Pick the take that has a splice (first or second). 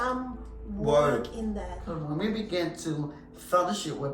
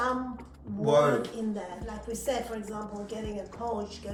first